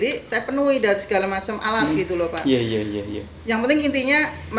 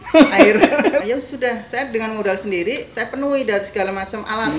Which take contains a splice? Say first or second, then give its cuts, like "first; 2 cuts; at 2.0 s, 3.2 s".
second; 1 cut; at 1.0 s